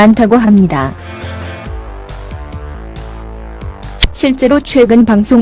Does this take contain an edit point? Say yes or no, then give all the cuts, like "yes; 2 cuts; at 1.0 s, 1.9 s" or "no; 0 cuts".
yes; 2 cuts; at 1.0 s, 2.1 s